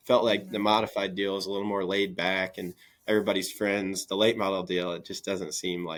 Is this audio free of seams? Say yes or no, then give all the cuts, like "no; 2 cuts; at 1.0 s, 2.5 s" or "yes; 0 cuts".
yes; 0 cuts